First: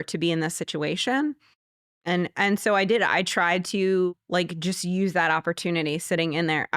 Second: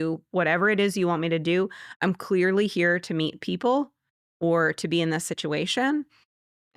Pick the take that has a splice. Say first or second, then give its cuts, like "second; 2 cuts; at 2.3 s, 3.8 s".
first; 1 cut; at 4.1 s